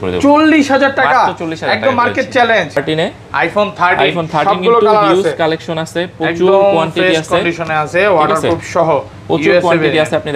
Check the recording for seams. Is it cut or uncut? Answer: cut